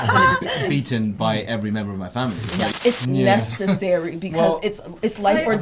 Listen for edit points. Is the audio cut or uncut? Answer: cut